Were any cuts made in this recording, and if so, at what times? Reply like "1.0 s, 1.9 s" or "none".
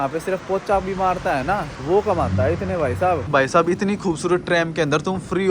1.7 s, 3.2 s

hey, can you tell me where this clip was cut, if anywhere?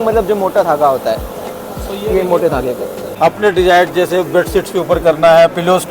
3.1 s

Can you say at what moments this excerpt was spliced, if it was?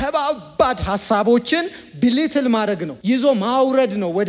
2.9 s

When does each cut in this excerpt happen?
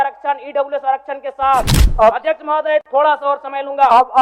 1.8 s

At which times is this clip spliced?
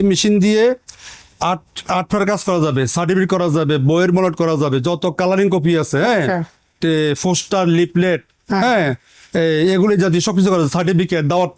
none

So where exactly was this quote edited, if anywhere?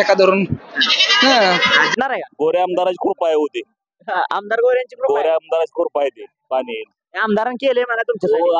1.9 s

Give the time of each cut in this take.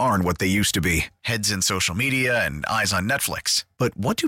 none

